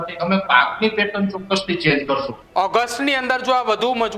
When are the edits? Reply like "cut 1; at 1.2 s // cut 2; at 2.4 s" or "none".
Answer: cut 1; at 2.4 s